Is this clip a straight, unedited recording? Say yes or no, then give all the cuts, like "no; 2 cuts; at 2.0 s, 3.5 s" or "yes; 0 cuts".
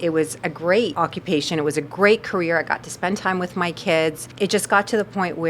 no; 2 cuts; at 0.9 s, 4.2 s